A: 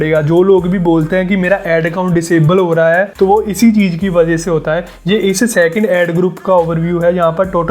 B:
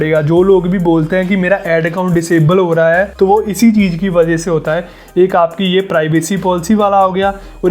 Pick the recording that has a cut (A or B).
A